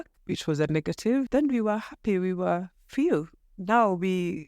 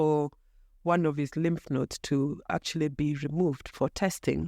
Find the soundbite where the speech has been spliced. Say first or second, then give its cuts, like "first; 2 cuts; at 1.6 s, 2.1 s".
first; 1 cut; at 1.3 s